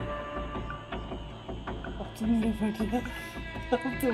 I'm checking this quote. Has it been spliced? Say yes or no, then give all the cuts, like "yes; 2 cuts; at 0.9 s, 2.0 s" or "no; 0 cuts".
no; 0 cuts